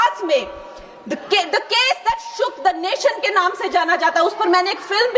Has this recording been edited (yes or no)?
no